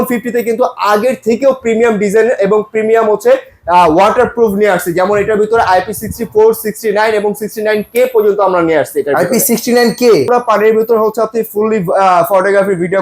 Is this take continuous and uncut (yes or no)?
no